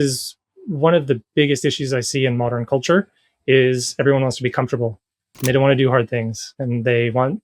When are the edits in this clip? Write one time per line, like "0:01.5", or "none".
none